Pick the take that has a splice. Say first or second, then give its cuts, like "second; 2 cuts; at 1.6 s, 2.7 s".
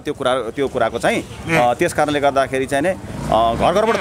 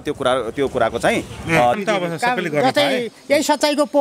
second; 1 cut; at 1.8 s